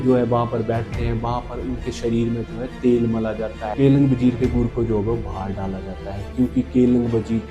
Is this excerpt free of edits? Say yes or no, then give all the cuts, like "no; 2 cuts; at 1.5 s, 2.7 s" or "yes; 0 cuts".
no; 1 cut; at 3.6 s